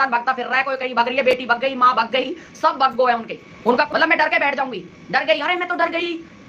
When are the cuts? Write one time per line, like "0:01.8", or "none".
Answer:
0:03.9